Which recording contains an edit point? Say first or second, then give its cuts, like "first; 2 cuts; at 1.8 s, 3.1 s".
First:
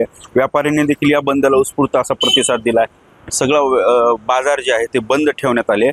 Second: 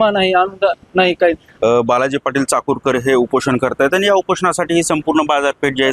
second; 1 cut; at 1.5 s